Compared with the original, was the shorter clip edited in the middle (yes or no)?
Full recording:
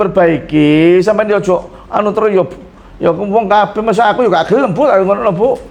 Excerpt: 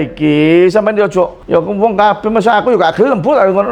yes